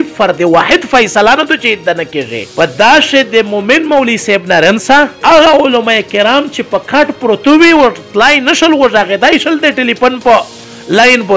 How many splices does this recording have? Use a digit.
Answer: 0